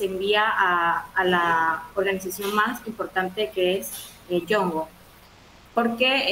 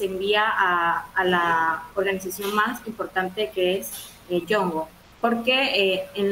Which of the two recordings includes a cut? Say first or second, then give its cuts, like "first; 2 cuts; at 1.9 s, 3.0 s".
second; 1 cut; at 5.0 s